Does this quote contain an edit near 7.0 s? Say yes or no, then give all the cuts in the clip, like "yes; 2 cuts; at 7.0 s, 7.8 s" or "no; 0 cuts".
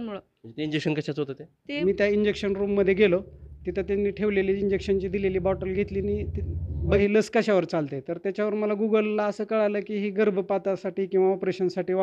yes; 2 cuts; at 1.8 s, 7.0 s